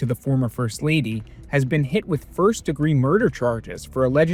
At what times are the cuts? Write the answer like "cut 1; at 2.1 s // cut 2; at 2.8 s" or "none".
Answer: none